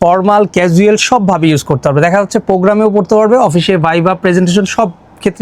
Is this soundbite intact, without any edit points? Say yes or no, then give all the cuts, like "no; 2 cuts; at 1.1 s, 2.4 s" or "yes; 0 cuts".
yes; 0 cuts